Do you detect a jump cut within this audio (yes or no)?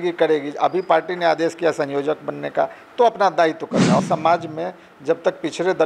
yes